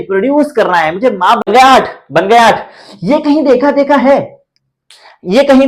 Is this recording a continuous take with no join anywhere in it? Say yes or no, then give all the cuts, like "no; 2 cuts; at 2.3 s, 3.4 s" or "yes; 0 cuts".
no; 1 cut; at 1.5 s